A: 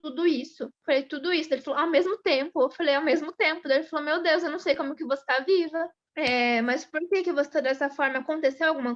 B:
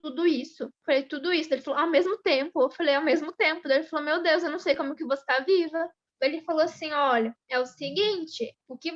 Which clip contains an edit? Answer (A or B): B